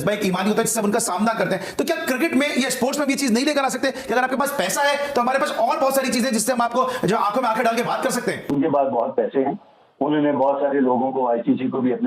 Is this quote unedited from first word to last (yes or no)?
no